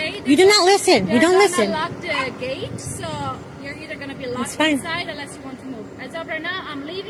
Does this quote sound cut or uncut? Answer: uncut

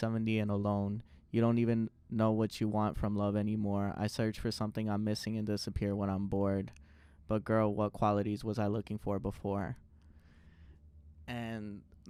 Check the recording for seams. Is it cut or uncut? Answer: uncut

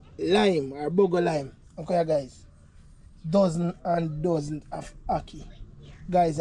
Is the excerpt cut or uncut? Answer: uncut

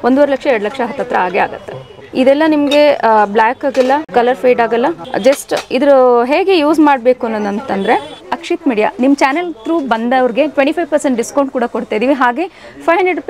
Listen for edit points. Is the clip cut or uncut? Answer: cut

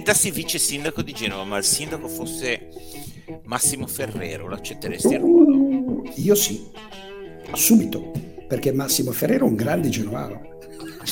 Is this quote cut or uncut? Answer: uncut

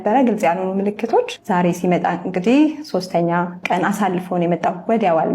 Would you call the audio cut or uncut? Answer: cut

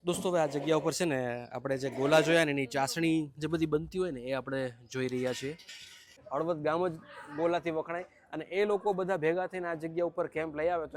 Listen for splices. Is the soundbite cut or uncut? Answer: cut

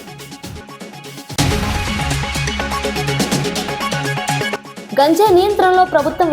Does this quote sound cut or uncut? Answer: cut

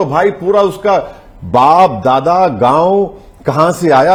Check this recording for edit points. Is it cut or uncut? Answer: uncut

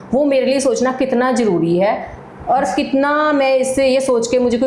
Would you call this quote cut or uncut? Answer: uncut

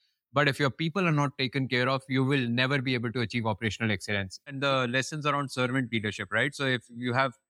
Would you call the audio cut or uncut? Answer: cut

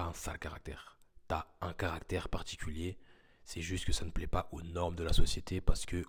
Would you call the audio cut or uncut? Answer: uncut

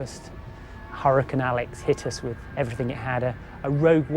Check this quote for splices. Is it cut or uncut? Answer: cut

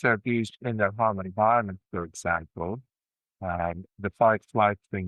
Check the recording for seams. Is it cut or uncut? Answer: uncut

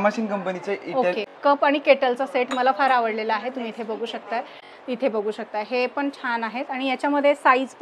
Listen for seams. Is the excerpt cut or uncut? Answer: cut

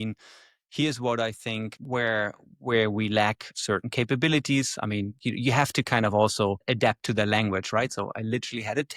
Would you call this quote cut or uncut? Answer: uncut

